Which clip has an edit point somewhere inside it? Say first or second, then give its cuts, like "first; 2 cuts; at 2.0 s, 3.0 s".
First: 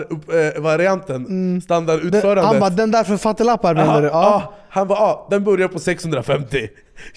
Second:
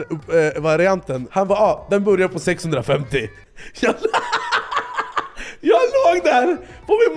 second; 1 cut; at 1.2 s